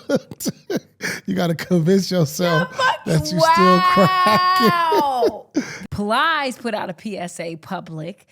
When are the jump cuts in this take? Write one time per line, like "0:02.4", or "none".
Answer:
0:05.8